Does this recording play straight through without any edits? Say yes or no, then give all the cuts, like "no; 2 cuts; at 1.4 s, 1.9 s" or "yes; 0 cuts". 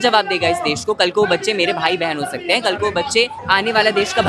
no; 1 cut; at 3.4 s